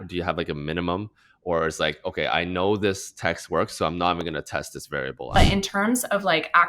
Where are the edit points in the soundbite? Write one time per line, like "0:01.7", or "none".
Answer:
0:05.4